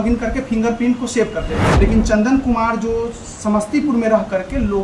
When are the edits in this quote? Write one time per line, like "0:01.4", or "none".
0:01.6